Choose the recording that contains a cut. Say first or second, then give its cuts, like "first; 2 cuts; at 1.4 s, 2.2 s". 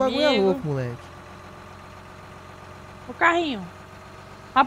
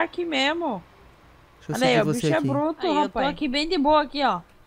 second; 1 cut; at 3.1 s